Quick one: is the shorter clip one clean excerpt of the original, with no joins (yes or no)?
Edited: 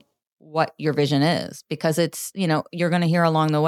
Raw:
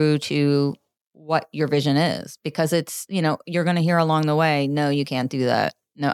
yes